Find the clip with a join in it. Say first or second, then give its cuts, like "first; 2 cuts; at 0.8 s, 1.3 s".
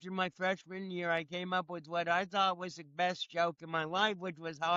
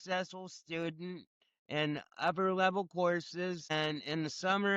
second; 1 cut; at 3.7 s